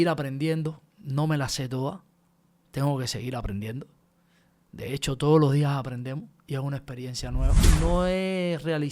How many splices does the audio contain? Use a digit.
1